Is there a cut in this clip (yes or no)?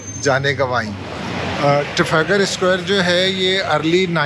yes